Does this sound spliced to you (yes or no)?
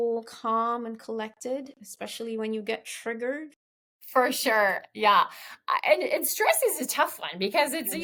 no